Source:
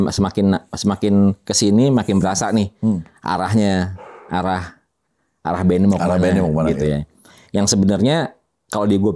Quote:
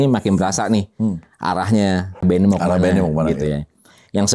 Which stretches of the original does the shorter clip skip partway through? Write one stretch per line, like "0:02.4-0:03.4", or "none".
0:04.0-0:05.6